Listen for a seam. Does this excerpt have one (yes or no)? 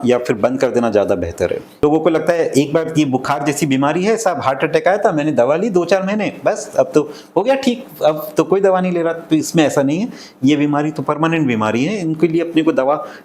yes